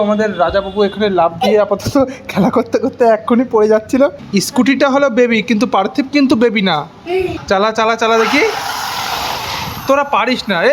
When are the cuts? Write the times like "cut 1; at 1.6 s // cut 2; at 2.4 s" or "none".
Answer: cut 1; at 4.2 s // cut 2; at 7.4 s